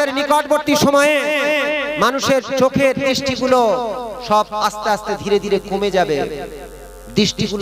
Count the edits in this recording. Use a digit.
0